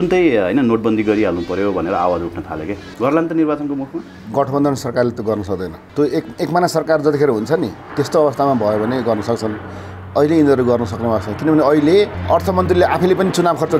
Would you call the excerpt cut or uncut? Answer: cut